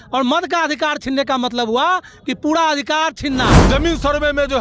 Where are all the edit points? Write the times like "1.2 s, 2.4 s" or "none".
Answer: 3.6 s